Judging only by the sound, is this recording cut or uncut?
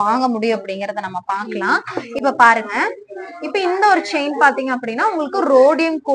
uncut